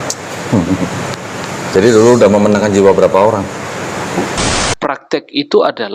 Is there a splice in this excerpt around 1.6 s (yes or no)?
no